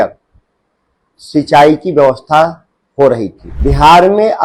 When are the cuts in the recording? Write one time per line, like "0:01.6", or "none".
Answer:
0:03.4